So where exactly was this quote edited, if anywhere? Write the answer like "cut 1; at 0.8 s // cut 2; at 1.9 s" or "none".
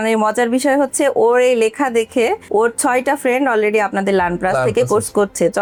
none